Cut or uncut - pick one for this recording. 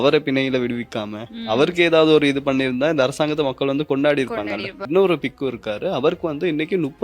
cut